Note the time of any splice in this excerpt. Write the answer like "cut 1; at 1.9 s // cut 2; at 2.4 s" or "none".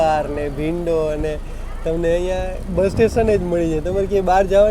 none